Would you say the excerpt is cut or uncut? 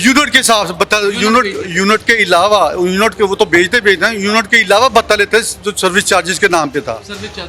uncut